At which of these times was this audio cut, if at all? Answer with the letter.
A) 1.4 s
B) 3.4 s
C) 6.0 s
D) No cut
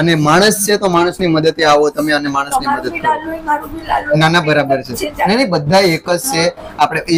D